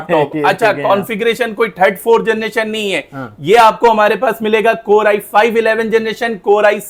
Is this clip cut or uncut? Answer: uncut